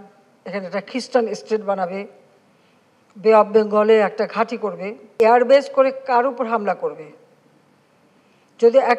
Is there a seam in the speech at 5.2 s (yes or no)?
yes